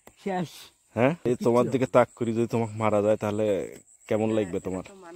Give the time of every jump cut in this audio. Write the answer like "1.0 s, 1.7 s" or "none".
1.2 s

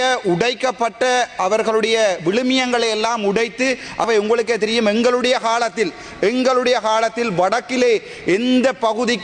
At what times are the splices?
4.1 s

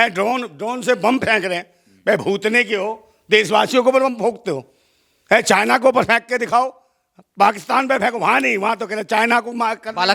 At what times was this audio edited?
none

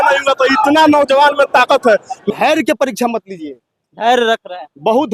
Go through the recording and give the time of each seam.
2.1 s

